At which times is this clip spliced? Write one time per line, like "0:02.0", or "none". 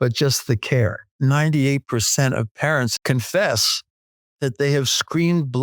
0:01.1
0:02.9

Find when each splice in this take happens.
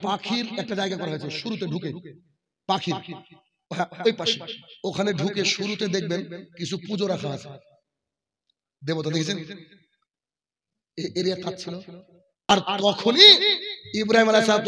0:12.5

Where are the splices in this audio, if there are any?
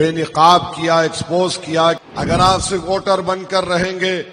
0:02.0

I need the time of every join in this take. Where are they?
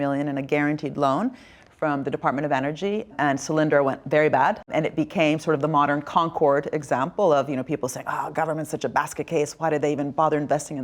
0:03.1
0:04.7

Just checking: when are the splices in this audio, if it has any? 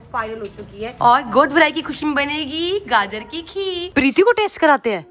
0:00.9
0:03.9

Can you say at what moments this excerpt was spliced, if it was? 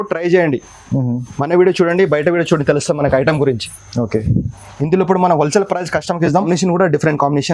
0:06.4

